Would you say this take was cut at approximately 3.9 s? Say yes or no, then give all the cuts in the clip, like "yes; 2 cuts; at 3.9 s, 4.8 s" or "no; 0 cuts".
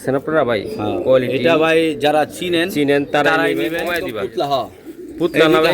yes; 1 cut; at 3.9 s